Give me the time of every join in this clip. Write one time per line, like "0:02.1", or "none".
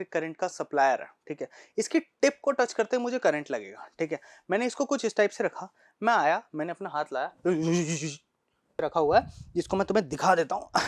0:08.8